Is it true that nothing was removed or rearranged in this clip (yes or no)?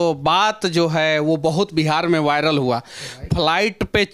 yes